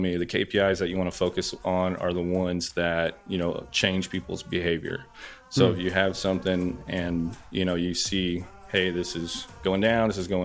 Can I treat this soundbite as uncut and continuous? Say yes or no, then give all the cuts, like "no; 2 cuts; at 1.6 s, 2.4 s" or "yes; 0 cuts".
yes; 0 cuts